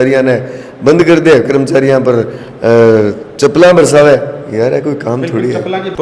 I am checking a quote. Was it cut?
no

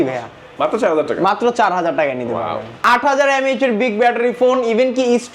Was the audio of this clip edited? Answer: yes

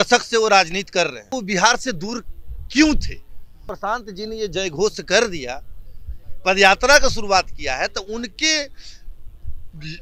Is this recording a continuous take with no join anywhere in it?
no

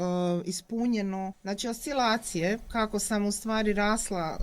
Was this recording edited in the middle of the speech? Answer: yes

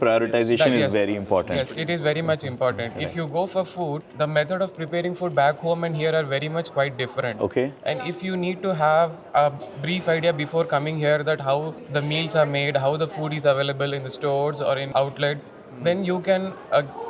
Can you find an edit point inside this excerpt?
no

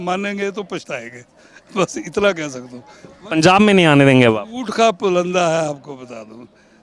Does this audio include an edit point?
no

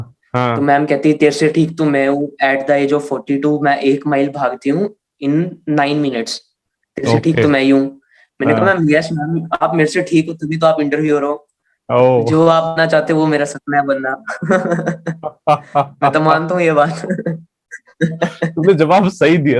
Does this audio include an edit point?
no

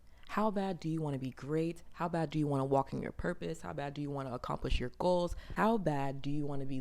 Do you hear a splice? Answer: yes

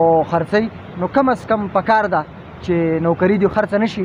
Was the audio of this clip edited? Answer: no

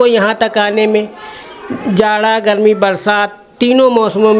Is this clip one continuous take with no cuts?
yes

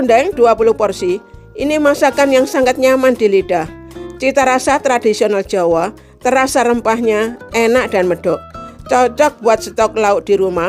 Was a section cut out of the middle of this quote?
no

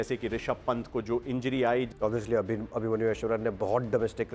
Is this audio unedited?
no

